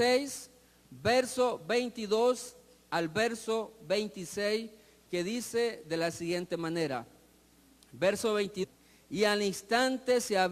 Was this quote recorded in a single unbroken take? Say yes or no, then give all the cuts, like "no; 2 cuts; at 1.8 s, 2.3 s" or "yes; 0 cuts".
yes; 0 cuts